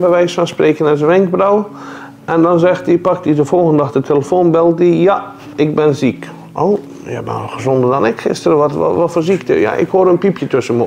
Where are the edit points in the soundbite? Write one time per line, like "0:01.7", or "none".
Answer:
none